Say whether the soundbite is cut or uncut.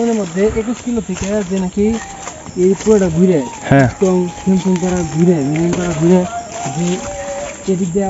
uncut